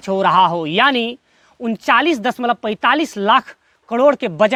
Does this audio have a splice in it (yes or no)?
no